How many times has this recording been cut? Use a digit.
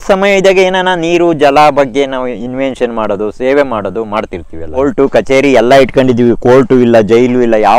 1